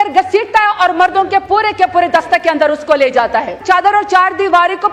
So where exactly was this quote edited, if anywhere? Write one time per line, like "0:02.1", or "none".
0:03.6